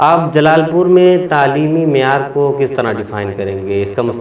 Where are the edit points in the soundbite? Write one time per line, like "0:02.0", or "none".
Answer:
none